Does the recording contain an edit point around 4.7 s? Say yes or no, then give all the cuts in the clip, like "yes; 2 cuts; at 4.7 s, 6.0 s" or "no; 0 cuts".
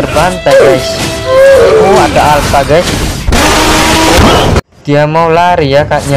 yes; 1 cut; at 4.7 s